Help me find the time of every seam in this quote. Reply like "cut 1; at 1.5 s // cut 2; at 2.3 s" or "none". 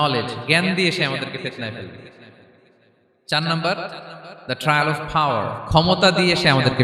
none